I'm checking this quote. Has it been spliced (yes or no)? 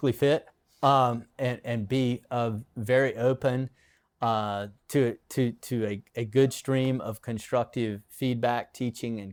no